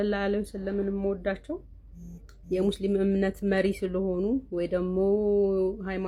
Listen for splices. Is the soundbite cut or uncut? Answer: uncut